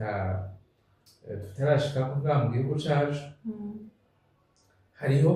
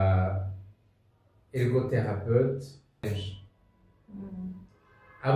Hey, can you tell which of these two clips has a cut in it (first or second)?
second